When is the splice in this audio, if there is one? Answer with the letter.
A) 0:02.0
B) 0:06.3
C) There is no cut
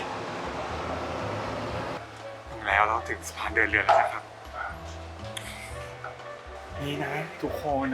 A